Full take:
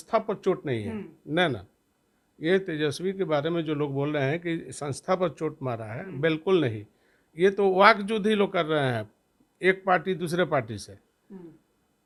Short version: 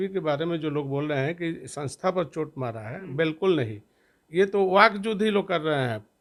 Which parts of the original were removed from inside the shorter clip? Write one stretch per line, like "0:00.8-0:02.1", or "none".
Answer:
none